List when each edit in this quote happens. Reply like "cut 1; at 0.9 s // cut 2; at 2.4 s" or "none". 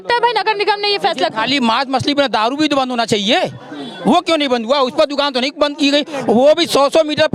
none